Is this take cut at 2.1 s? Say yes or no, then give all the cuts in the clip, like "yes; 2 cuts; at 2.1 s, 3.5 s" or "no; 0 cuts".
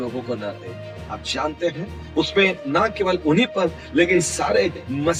no; 0 cuts